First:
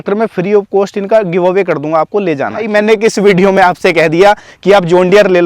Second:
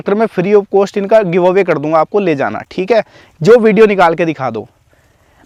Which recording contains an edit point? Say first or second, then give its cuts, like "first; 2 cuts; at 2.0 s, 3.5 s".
first; 1 cut; at 2.6 s